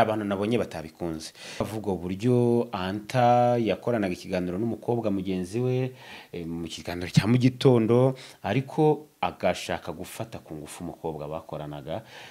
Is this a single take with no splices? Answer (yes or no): no